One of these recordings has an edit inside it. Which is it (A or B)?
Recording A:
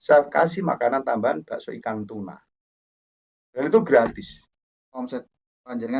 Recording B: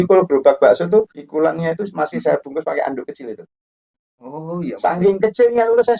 A